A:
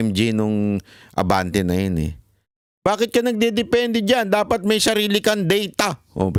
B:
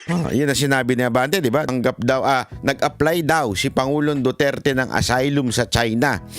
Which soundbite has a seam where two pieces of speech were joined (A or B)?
B